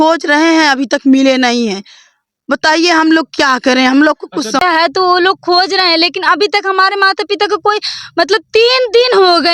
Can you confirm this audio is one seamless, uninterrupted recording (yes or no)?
no